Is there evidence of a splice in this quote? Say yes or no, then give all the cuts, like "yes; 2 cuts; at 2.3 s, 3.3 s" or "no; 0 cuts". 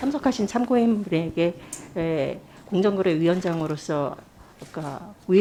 no; 0 cuts